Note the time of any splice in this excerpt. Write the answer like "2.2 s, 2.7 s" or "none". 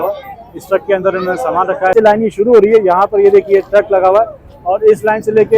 1.9 s